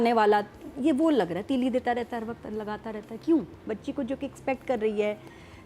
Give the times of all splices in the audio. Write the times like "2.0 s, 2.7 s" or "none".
3.8 s